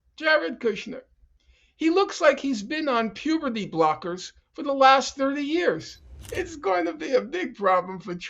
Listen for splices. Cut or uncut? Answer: cut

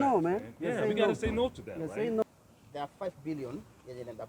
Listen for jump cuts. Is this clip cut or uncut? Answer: cut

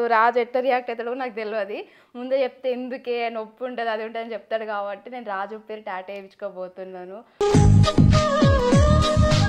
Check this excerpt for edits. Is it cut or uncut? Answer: uncut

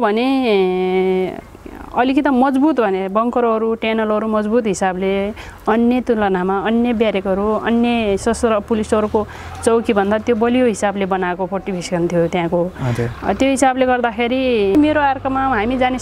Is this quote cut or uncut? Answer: cut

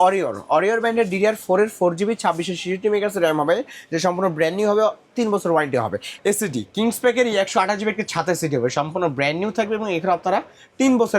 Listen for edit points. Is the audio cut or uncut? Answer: cut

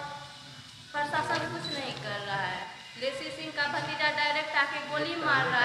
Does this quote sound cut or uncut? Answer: cut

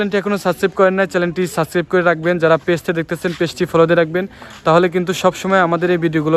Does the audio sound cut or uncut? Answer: uncut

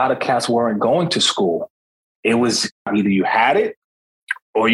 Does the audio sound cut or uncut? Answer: cut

